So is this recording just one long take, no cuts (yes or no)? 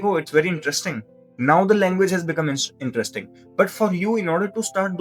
yes